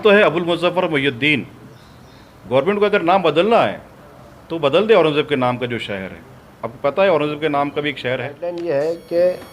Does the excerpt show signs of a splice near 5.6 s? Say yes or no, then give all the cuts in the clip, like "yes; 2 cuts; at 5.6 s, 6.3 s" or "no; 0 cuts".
no; 1 cut; at 8.6 s